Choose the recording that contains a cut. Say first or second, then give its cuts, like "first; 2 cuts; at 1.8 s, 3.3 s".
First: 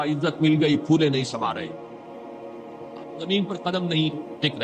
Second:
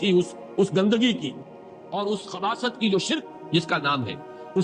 first; 2 cuts; at 1.7 s, 3.2 s